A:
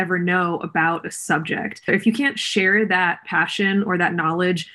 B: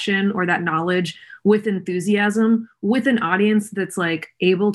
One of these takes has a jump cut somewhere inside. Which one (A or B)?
A